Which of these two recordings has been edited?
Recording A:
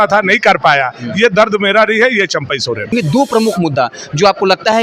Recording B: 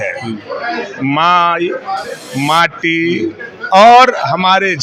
A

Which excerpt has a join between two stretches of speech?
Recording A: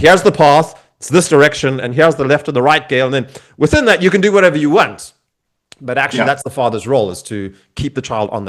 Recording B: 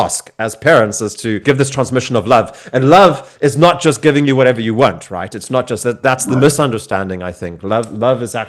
B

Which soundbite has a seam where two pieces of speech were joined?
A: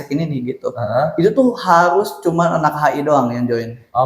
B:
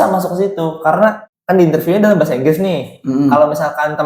B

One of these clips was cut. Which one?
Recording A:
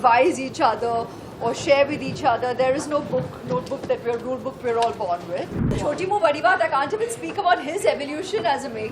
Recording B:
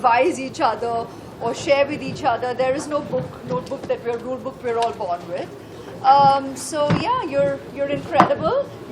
A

